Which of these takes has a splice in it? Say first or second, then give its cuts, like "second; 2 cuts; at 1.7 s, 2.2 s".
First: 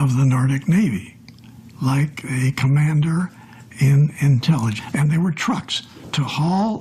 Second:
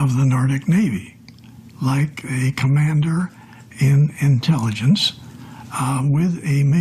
second; 1 cut; at 4.8 s